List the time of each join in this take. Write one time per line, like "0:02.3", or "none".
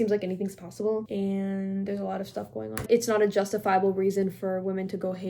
0:01.1
0:02.8

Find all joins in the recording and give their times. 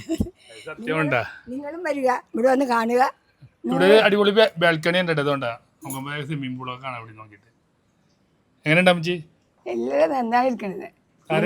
0:03.5

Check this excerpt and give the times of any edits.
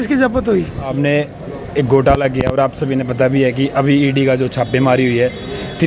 0:00.9

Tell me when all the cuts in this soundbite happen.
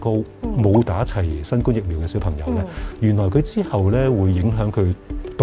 none

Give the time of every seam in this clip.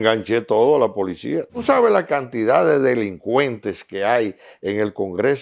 0:01.6

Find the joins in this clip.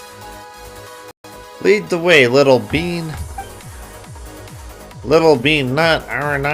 0:01.1

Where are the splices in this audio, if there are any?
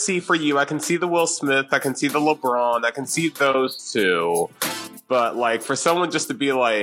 none

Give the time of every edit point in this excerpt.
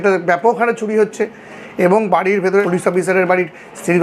0:02.7

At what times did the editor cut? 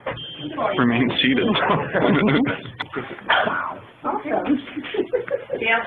0:02.8

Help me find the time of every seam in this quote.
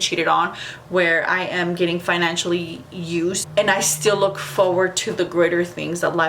0:03.4

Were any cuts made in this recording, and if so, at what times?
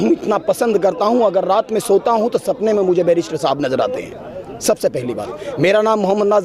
none

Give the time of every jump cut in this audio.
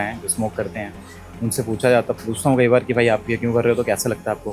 none

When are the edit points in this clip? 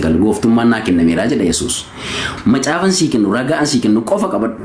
0:02.3

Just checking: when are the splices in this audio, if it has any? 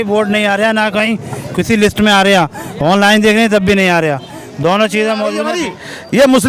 0:05.4

